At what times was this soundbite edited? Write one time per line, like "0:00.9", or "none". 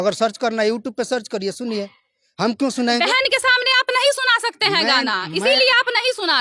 none